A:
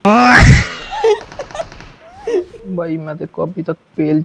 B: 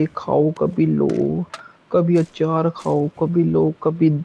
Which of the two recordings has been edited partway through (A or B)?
A